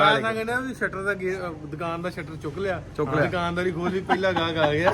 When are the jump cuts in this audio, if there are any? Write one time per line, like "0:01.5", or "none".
none